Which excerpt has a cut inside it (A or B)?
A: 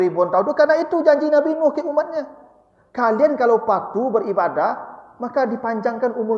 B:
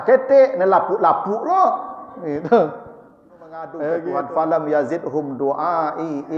B